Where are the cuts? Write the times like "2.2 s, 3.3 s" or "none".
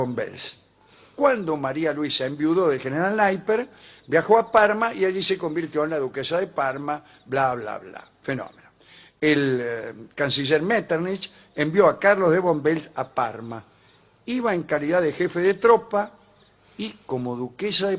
none